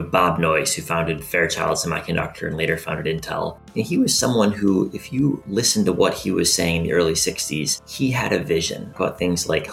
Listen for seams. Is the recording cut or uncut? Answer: cut